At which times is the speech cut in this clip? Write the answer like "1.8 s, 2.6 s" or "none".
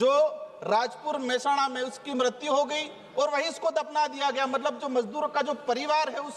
none